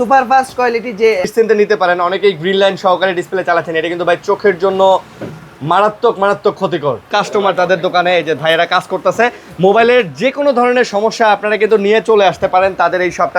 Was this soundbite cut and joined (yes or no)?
yes